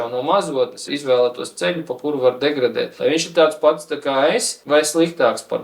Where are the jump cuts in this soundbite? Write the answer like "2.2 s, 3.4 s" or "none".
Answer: 0.8 s, 2.9 s, 4.5 s